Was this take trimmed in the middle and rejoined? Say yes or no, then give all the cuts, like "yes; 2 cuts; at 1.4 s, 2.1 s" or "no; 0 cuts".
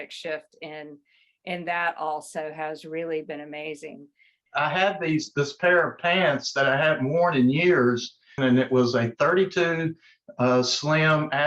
yes; 2 cuts; at 4.4 s, 8.3 s